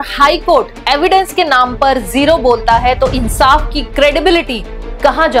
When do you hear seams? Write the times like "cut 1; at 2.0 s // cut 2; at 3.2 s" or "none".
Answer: none